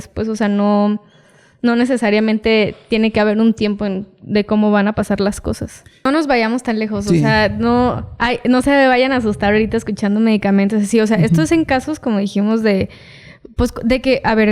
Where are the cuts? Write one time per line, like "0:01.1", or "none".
0:06.1